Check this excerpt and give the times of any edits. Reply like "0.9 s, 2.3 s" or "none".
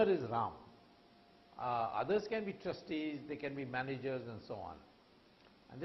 none